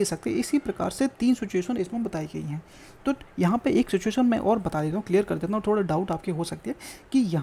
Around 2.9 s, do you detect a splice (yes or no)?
no